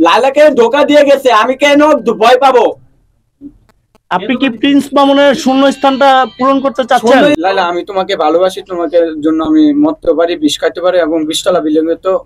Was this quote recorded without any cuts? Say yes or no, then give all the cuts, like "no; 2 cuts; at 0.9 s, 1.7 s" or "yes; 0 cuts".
no; 1 cut; at 7.4 s